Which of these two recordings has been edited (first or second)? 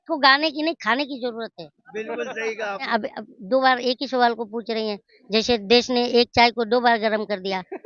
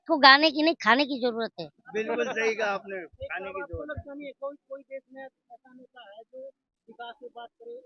first